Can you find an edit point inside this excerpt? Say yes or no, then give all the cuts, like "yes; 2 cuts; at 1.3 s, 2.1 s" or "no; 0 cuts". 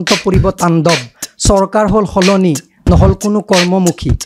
no; 0 cuts